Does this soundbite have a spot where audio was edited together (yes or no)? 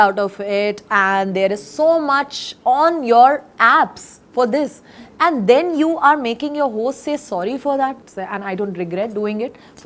yes